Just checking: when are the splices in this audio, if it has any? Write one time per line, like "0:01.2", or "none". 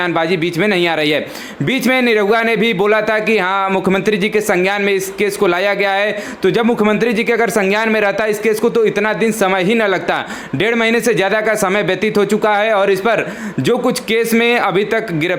none